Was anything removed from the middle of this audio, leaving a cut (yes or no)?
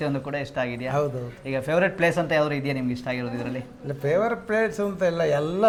no